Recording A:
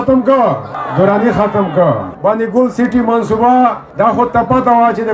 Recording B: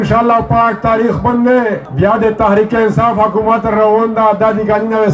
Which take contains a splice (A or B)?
A